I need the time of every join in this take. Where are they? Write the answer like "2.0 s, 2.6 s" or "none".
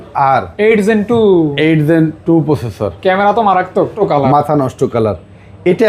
3.9 s